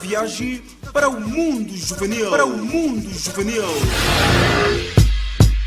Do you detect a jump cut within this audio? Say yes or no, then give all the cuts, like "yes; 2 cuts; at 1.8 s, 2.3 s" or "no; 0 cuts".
no; 0 cuts